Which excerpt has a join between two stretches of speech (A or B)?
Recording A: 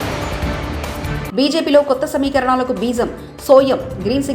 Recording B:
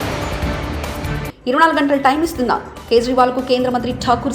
B